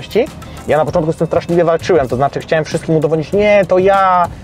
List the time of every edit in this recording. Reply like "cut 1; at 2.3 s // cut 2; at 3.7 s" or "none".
none